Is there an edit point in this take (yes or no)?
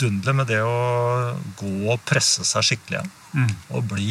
no